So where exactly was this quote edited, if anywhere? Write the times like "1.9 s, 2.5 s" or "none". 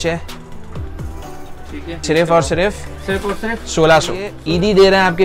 2.0 s, 4.3 s